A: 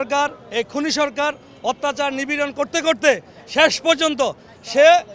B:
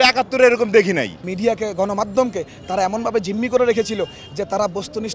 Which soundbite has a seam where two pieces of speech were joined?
B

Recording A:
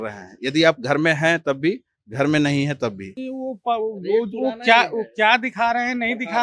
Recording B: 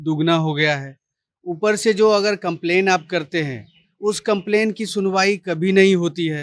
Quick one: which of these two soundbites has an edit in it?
A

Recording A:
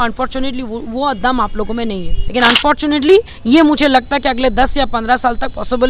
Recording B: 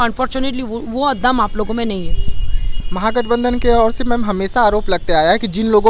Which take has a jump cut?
A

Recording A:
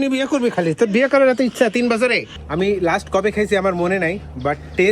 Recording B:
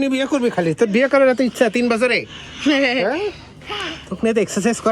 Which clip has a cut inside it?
A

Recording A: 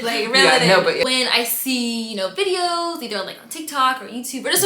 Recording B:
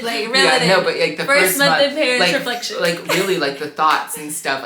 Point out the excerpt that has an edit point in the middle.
A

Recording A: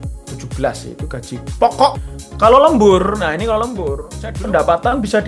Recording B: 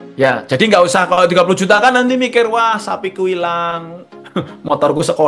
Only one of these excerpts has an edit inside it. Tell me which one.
A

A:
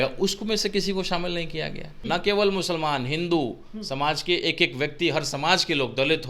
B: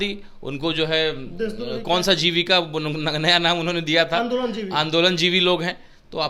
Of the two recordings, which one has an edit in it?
A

